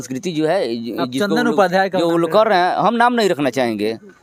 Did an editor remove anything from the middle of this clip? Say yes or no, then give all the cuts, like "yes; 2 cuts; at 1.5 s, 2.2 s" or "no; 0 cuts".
no; 0 cuts